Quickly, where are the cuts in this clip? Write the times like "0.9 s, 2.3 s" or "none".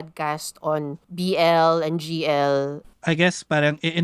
1.0 s, 2.8 s